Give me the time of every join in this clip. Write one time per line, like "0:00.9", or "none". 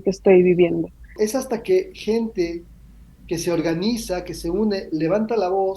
0:01.1